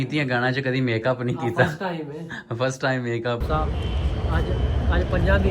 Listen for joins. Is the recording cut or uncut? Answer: cut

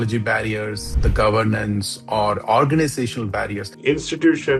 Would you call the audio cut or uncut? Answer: cut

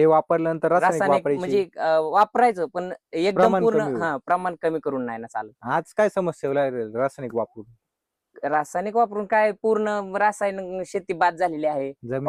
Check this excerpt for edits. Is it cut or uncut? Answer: uncut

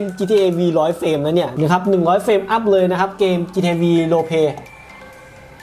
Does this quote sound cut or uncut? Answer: cut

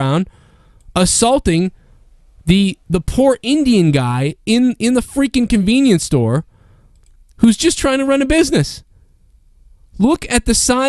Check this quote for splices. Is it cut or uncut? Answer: uncut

